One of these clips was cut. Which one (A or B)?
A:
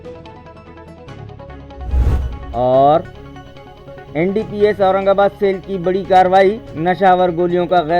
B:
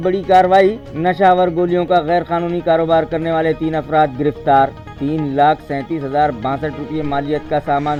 A